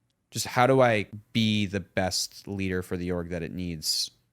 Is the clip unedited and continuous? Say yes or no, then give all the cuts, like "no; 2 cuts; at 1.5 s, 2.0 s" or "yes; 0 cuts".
no; 1 cut; at 1.2 s